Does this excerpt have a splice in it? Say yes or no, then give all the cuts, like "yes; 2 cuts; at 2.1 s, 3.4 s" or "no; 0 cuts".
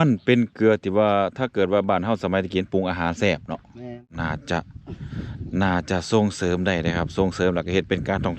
yes; 1 cut; at 4.2 s